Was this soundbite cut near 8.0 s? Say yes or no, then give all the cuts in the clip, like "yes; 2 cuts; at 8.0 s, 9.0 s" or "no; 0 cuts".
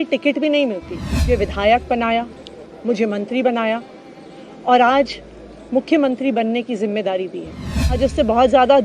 yes; 2 cuts; at 1.3 s, 8.0 s